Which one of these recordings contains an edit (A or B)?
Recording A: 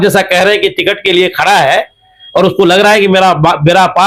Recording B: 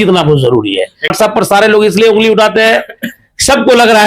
B